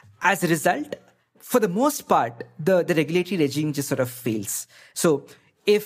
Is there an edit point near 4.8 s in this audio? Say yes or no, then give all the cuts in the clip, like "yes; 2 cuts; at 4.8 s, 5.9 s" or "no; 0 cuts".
yes; 1 cut; at 4.8 s